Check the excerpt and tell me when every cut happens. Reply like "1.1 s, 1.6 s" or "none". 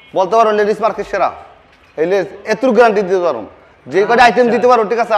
none